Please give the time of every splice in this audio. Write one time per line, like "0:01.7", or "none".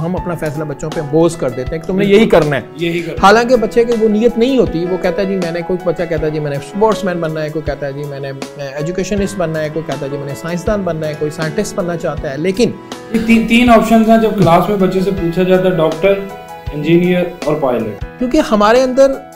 none